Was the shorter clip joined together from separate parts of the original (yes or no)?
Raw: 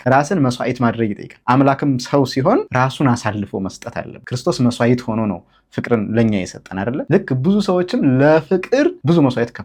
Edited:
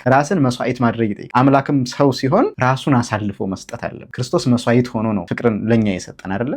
yes